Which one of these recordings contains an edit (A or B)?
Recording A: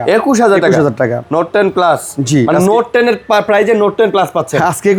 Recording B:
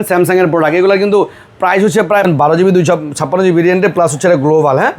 B